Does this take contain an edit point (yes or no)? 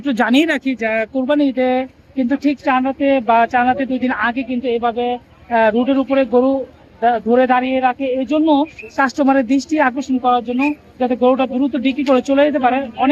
no